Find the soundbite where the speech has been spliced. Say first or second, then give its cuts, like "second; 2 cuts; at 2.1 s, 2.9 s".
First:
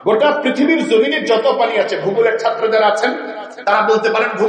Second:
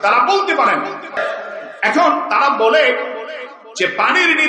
second; 1 cut; at 1.2 s